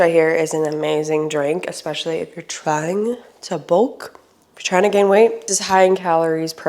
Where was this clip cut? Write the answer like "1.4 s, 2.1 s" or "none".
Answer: none